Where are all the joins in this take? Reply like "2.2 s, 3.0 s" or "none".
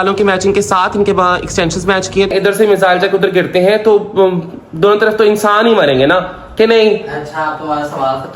2.3 s